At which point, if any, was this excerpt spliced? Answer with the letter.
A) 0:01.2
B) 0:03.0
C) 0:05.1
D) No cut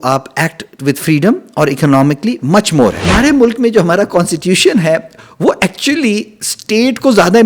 B